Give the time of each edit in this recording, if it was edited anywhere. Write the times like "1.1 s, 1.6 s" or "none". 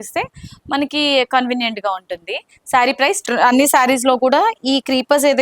3.2 s